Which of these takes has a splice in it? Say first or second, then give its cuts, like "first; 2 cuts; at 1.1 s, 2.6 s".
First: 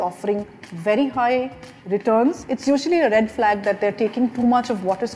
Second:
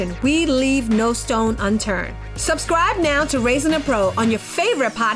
first; 1 cut; at 2.4 s